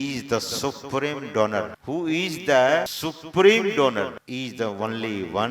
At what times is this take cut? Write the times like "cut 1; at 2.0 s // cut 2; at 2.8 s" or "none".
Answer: cut 1; at 1.8 s // cut 2; at 2.9 s // cut 3; at 4.2 s